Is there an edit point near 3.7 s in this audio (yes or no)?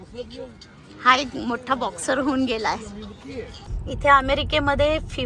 yes